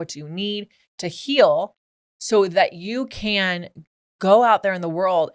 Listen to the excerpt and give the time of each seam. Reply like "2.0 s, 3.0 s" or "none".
none